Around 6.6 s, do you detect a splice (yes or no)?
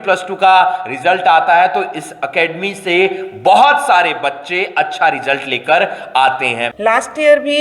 yes